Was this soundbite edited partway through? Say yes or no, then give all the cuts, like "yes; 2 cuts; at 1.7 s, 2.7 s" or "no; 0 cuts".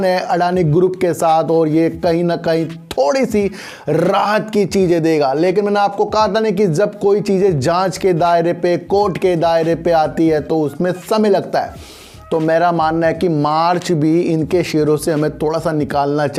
no; 0 cuts